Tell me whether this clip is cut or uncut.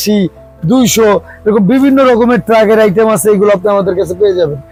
uncut